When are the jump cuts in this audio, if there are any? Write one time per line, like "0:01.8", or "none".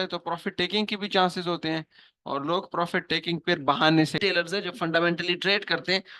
0:04.2

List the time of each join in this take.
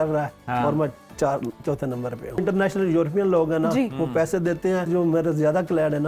0:02.4
0:04.9

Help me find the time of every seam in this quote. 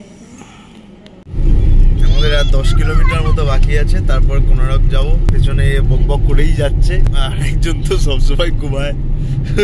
0:01.2
0:05.3
0:07.1

